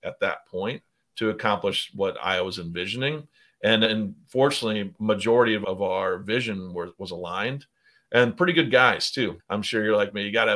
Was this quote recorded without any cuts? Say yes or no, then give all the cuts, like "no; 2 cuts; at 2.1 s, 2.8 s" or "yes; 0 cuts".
no; 4 cuts; at 1.9 s, 3.9 s, 5.6 s, 9.4 s